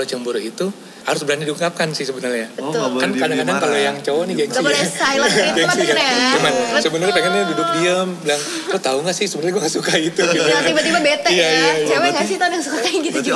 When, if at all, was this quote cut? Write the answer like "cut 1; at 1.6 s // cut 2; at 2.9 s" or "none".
cut 1; at 1.0 s